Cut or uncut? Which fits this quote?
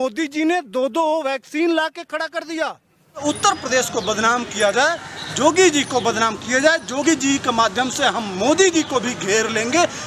cut